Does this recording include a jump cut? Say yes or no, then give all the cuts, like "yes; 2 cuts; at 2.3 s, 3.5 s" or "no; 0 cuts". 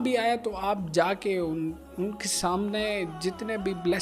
no; 0 cuts